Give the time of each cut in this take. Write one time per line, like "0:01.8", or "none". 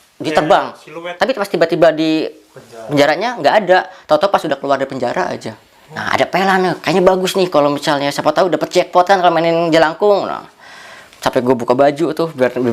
0:01.1
0:06.0